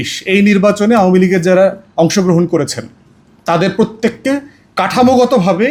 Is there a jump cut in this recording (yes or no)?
no